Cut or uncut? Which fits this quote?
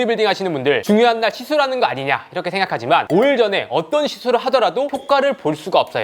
uncut